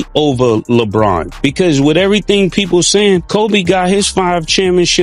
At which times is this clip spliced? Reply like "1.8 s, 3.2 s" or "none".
none